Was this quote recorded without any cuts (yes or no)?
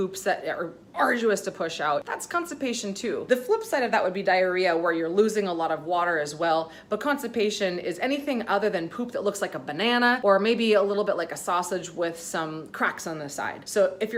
yes